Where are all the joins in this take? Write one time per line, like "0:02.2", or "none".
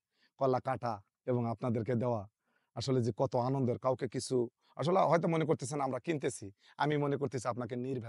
none